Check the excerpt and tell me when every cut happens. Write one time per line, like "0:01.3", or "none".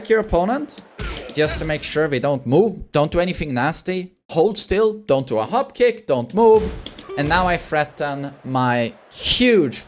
none